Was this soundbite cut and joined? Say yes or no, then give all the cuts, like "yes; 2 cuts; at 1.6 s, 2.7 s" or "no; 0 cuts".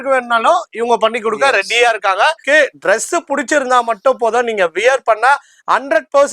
yes; 1 cut; at 2.4 s